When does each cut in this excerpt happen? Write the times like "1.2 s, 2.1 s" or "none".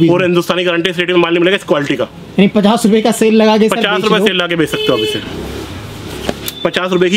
none